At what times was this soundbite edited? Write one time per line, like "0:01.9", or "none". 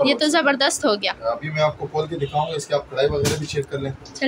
none